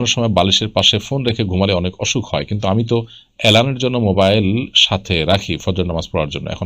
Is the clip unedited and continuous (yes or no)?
yes